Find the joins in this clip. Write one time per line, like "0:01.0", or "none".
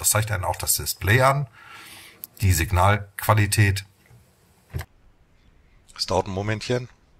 0:04.9